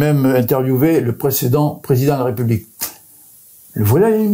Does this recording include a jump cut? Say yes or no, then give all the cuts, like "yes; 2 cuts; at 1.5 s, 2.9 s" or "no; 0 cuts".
no; 0 cuts